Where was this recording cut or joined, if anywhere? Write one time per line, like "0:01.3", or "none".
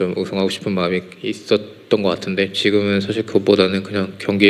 none